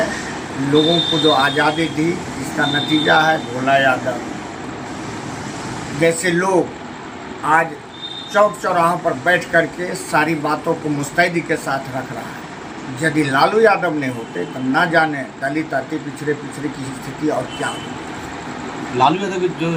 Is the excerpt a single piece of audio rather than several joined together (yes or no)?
yes